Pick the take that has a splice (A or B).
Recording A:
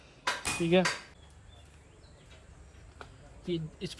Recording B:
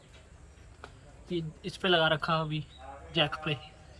A